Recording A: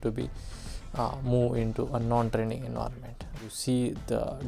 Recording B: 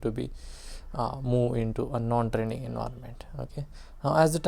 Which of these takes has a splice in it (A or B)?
A